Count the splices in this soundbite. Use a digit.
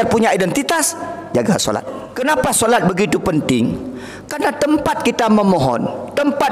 1